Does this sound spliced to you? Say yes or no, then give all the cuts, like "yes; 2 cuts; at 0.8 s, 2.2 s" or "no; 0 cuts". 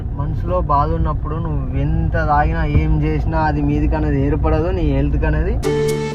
no; 0 cuts